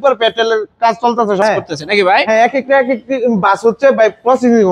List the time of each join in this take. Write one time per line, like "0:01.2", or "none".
0:01.4